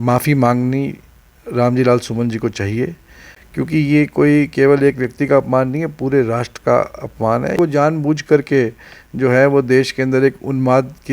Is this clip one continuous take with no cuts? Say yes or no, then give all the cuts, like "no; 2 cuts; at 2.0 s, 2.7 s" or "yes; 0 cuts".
no; 1 cut; at 7.6 s